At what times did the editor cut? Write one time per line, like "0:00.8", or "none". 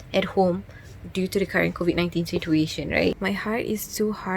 0:03.2